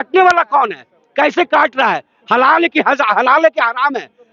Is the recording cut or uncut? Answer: uncut